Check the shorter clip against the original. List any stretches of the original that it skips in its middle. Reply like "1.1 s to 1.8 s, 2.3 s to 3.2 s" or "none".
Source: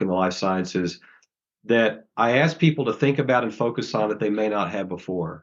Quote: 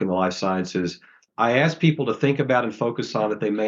1.3 s to 2.0 s